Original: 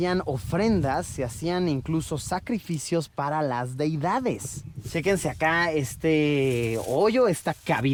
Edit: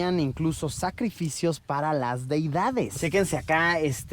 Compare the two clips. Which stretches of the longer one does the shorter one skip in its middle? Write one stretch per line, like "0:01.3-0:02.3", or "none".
0:04.4-0:04.9